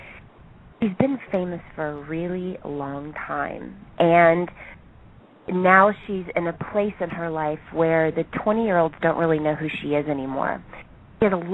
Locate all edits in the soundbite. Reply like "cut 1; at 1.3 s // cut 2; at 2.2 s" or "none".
cut 1; at 5.8 s